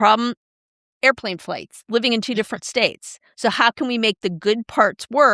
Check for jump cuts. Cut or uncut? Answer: uncut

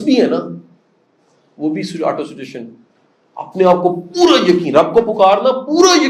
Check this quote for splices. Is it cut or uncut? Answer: uncut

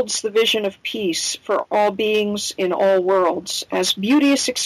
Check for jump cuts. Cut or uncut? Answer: cut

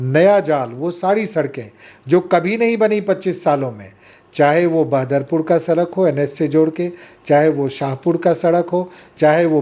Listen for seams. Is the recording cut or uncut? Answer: uncut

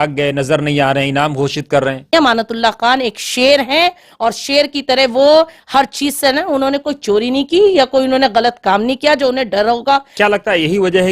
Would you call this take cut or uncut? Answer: cut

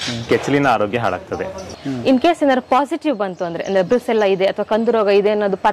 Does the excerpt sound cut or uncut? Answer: cut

